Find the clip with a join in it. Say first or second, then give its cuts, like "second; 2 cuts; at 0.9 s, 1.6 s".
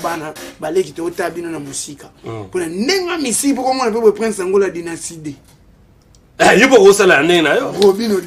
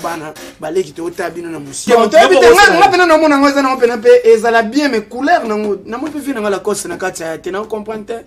second; 1 cut; at 1.8 s